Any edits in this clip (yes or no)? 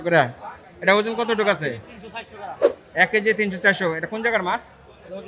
no